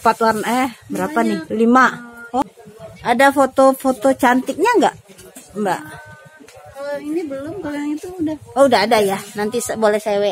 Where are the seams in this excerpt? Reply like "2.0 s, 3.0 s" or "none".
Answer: 2.4 s